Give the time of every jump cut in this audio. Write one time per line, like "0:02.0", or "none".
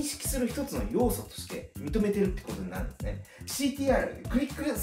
0:03.3